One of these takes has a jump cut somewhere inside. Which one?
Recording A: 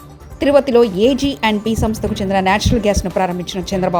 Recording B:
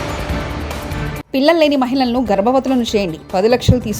B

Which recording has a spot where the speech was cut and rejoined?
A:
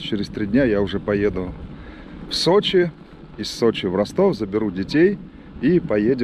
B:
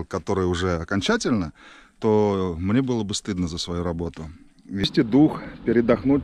B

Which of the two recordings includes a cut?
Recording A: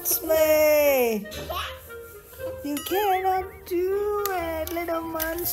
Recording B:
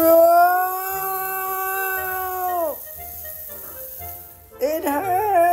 B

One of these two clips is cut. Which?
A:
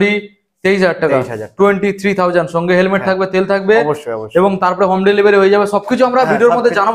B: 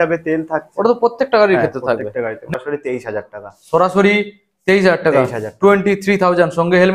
B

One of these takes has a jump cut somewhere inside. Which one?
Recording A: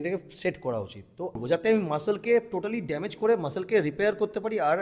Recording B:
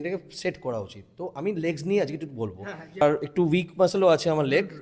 A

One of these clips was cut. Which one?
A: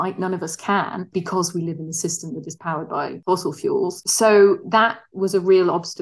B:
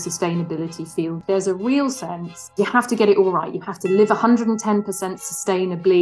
B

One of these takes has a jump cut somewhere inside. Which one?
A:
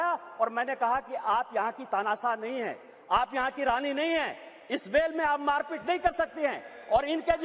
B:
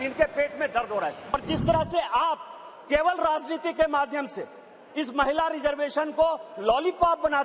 B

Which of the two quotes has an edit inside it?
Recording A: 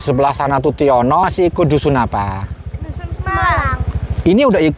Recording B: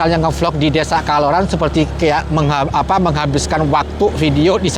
A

